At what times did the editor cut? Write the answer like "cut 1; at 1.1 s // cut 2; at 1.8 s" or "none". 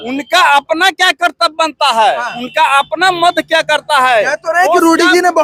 none